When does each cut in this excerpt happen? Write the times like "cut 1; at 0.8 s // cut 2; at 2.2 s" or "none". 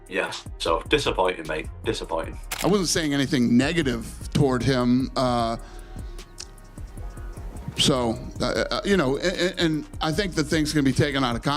cut 1; at 2.4 s